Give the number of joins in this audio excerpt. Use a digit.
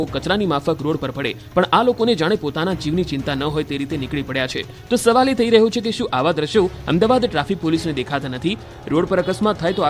1